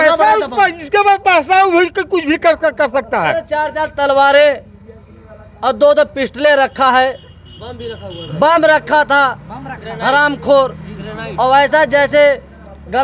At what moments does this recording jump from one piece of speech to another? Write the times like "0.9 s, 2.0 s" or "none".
none